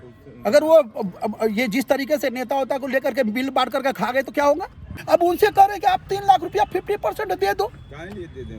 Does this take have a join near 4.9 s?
yes; 1 cut; at 4.9 s

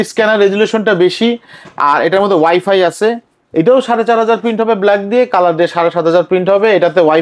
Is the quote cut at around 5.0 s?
no; 0 cuts

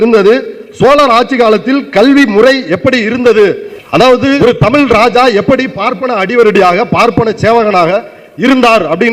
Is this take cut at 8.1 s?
no; 1 cut; at 3.9 s

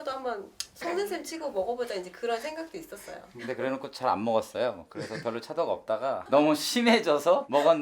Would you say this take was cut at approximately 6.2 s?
yes; 1 cut; at 6.2 s

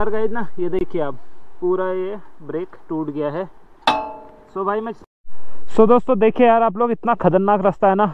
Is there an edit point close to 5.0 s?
yes; 1 cut; at 5.0 s

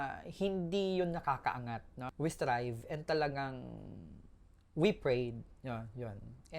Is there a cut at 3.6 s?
no; 1 cut; at 2.0 s

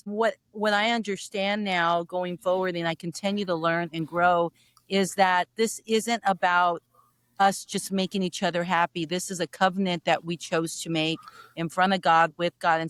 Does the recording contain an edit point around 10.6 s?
no; 0 cuts

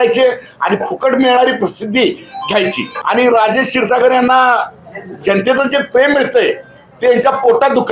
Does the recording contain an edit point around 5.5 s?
no; 1 cut; at 2.9 s

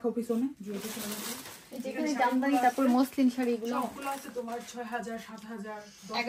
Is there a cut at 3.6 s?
no; 0 cuts

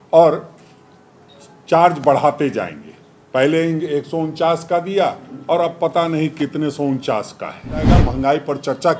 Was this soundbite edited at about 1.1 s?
no; 1 cut; at 7.9 s

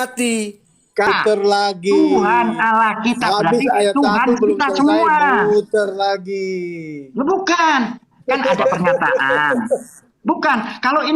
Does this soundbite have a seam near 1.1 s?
yes; 1 cut; at 1.1 s

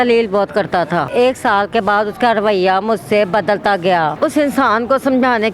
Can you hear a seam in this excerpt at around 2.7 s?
no; 2 cuts; at 1.1 s, 4.1 s

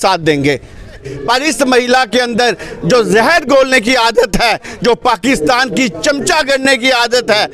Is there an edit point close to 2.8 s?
no; 1 cut; at 1.1 s

